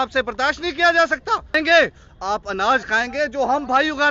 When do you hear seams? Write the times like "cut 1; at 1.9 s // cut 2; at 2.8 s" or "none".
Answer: cut 1; at 1.5 s